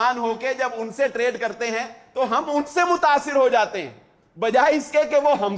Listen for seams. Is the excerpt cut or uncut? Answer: uncut